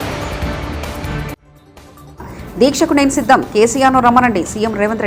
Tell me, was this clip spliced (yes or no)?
no